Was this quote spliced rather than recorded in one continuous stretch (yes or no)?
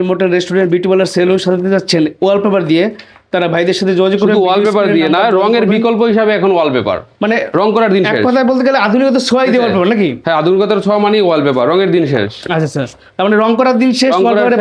no